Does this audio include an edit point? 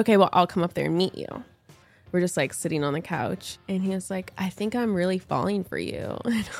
yes; 2 cuts; at 1.9 s, 3.4 s

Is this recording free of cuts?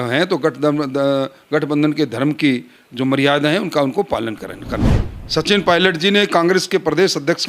no; 1 cut; at 4.9 s

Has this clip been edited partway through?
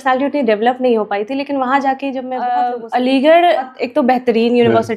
yes; 2 cuts; at 2.7 s, 3.8 s

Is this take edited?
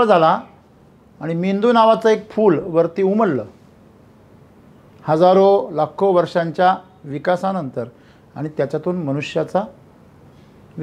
no; 0 cuts

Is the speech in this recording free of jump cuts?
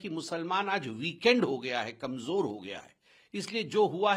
yes; 0 cuts

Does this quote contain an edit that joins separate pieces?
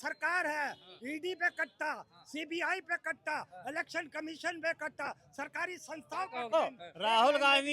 yes; 1 cut; at 6.5 s

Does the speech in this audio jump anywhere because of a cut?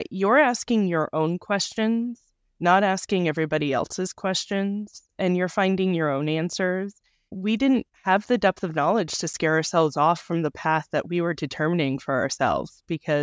yes; 1 cut; at 7.2 s

